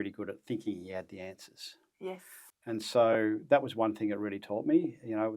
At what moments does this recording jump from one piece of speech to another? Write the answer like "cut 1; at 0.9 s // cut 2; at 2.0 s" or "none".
cut 1; at 2.4 s